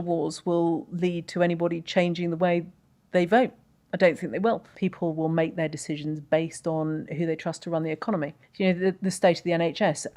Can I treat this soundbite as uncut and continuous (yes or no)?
no